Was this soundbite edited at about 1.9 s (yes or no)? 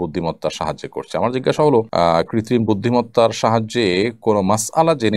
yes